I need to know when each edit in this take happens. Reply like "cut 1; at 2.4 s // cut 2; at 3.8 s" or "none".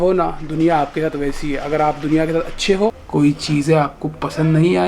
cut 1; at 3.0 s